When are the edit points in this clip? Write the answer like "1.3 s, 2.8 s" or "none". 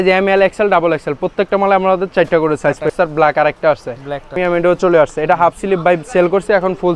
2.9 s, 4.4 s